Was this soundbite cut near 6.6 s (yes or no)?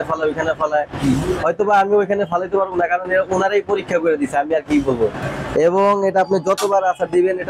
no